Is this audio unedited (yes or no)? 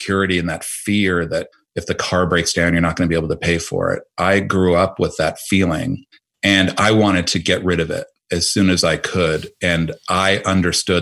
yes